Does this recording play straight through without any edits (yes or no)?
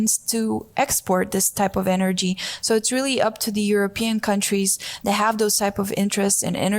yes